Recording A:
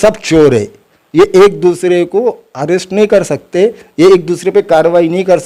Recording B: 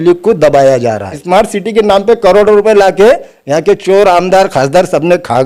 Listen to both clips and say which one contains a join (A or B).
B